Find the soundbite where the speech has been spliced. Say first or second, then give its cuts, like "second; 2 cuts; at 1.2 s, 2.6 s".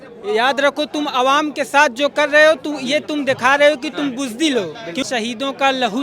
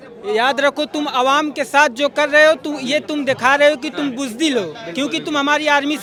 first; 1 cut; at 5.0 s